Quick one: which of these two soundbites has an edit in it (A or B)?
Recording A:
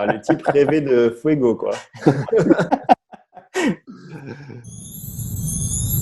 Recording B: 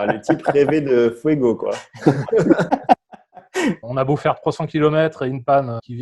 B